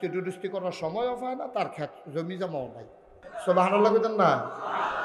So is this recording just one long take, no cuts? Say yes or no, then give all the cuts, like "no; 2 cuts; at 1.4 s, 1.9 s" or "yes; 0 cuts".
no; 1 cut; at 3.2 s